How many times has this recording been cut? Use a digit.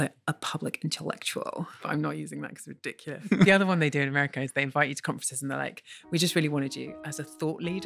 2